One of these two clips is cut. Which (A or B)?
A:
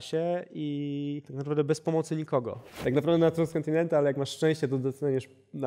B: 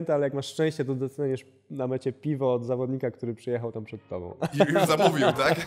A